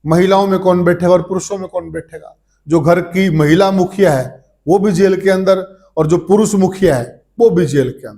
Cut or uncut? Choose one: uncut